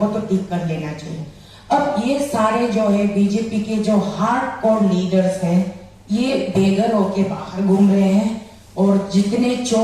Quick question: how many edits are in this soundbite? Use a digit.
0